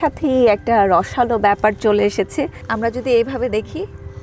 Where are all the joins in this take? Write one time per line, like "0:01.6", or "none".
0:02.6